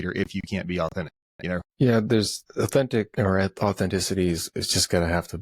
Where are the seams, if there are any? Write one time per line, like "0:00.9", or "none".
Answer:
0:01.7
0:02.4
0:03.1